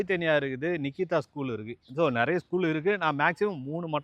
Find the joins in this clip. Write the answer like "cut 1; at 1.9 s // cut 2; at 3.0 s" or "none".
none